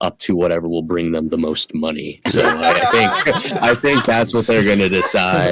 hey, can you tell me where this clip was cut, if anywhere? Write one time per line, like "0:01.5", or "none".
none